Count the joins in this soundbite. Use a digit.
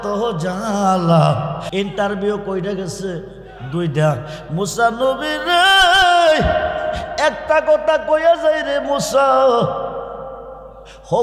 1